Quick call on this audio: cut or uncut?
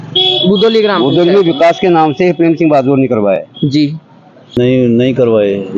cut